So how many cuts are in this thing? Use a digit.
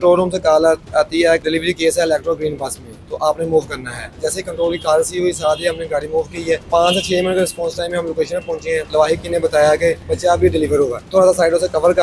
6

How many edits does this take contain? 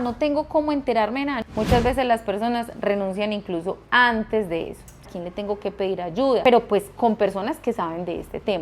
3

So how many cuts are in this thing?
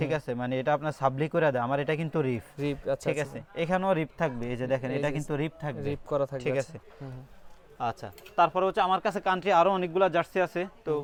0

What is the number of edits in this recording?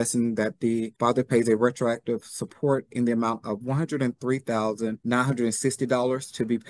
2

